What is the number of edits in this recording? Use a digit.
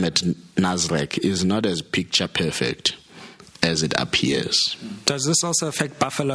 1